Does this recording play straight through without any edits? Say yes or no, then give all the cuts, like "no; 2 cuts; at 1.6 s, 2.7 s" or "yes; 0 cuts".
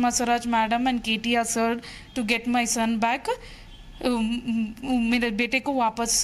yes; 0 cuts